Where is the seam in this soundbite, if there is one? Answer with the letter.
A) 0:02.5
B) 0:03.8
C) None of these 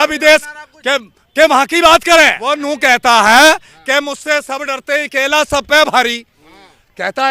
A